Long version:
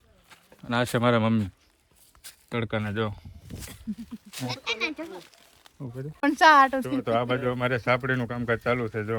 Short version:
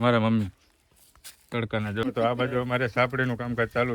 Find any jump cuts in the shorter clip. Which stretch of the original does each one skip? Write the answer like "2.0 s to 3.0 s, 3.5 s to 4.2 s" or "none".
3.0 s to 6.9 s